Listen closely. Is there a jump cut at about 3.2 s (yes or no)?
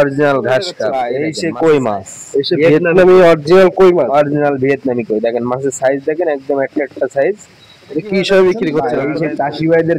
no